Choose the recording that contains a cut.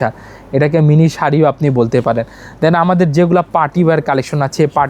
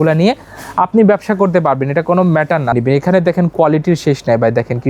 second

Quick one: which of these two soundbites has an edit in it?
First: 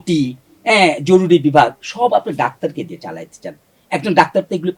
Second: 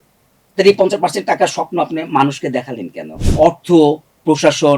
second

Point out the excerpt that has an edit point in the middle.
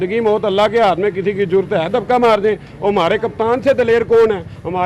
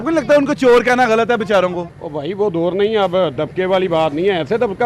second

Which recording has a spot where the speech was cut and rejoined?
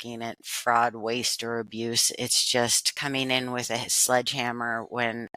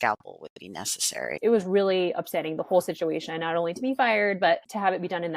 second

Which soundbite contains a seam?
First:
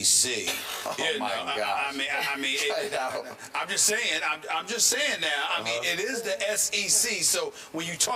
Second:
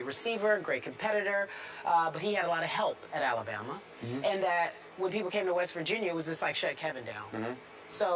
second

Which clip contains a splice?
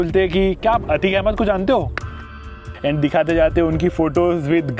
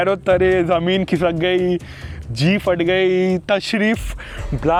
first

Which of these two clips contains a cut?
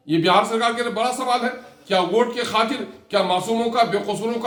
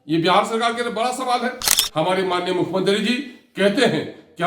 second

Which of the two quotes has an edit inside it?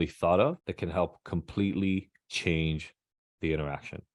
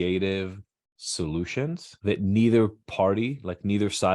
second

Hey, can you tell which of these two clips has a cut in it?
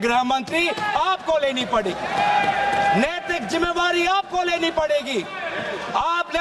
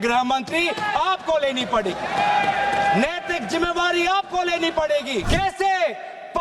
second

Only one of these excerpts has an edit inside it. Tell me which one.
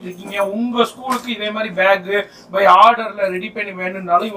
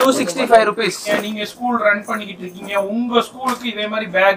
second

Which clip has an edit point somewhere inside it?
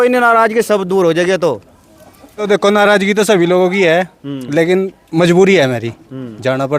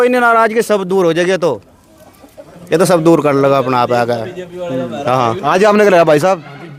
first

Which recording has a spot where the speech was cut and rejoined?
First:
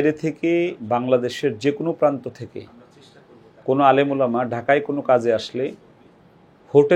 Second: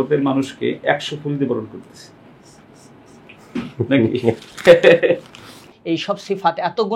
second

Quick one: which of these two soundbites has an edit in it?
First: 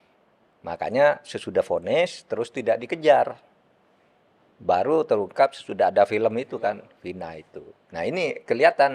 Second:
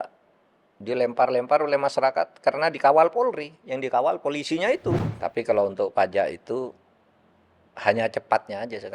second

